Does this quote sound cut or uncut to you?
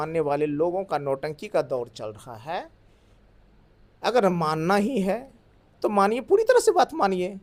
uncut